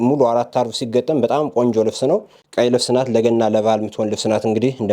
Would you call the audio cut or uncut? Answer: cut